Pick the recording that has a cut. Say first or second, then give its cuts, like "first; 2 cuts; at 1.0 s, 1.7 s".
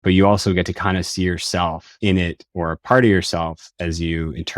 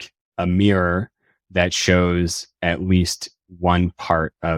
first; 1 cut; at 1.9 s